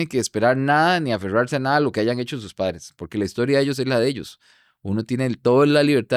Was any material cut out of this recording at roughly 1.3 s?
no; 0 cuts

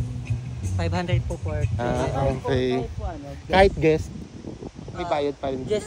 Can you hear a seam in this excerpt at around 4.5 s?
no; 1 cut; at 1.8 s

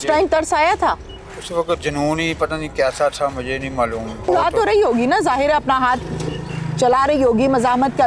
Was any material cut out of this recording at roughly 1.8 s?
no; 1 cut; at 4.3 s

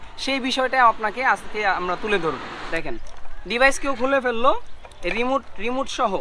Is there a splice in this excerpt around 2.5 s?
yes; 1 cut; at 2.5 s

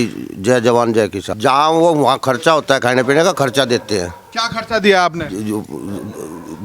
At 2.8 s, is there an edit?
no; 1 cut; at 1.2 s

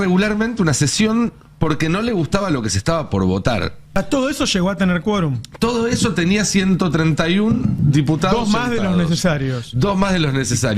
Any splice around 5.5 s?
no; 1 cut; at 4.0 s

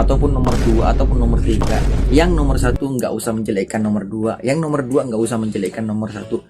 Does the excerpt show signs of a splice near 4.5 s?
no; 0 cuts

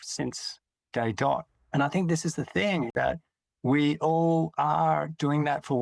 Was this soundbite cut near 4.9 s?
no; 2 cuts; at 1.6 s, 2.9 s

